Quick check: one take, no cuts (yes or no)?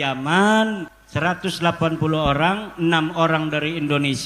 no